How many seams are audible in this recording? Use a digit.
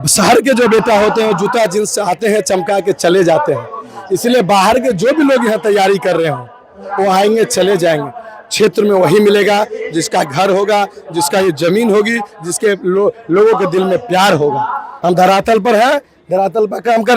1